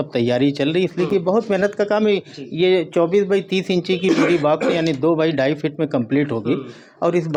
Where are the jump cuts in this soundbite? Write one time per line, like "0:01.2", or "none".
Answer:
none